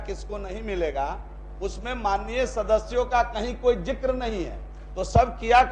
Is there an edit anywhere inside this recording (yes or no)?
no